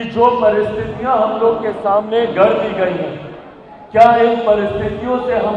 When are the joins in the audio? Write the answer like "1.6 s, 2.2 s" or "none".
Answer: none